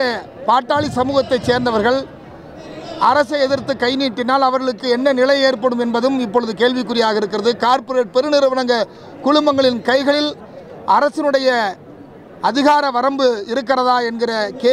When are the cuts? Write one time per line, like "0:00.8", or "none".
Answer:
none